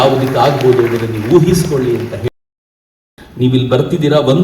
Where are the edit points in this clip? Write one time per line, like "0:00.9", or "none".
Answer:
0:02.7